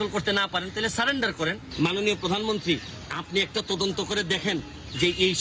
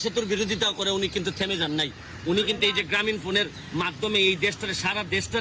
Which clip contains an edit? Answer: first; 1 cut; at 1.7 s

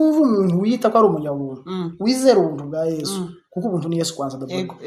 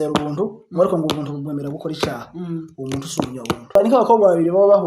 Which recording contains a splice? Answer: second; 1 cut; at 3.7 s

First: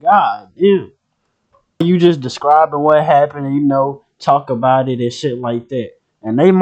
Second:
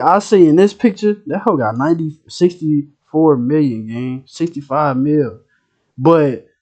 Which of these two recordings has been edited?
first; 1 cut; at 1.8 s

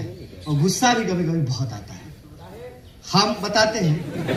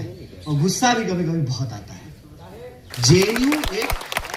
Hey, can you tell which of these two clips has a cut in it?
second; 1 cut; at 2.9 s

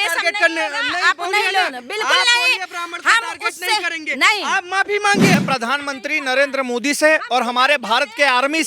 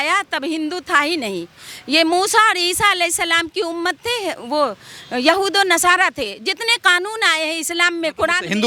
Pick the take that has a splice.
first; 1 cut; at 5.4 s

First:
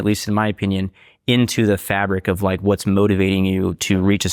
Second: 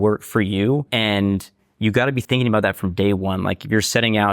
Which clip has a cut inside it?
second; 2 cuts; at 0.9 s, 2.2 s

